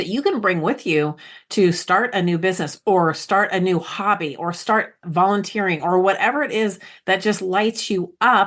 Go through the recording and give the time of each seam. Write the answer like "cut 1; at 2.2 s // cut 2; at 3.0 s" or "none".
cut 1; at 5.0 s